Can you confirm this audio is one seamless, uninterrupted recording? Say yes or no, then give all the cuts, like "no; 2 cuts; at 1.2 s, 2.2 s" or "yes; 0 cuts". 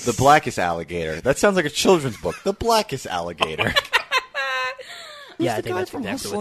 no; 1 cut; at 5.4 s